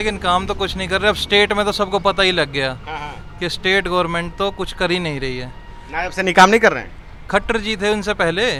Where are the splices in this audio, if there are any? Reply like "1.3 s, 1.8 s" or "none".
none

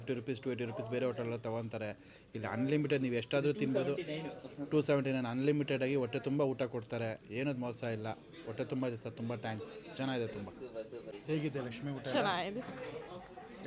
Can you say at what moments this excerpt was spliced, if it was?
none

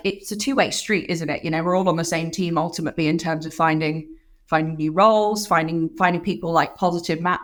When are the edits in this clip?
none

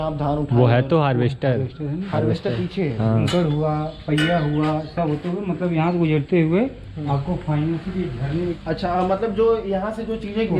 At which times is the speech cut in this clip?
3.3 s, 8.6 s

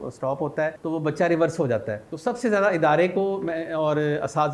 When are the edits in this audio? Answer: 0.8 s, 2.0 s

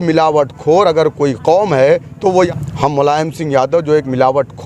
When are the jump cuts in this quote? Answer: 2.5 s

